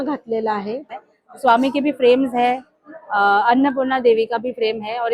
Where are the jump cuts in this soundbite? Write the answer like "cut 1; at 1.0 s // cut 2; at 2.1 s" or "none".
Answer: cut 1; at 0.9 s